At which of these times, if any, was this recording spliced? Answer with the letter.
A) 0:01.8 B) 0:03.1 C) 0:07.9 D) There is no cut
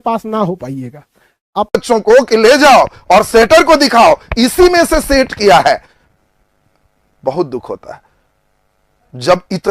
A